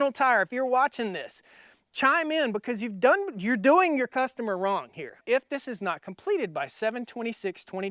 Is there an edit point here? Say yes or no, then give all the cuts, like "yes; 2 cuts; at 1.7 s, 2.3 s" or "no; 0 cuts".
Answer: yes; 1 cut; at 5.2 s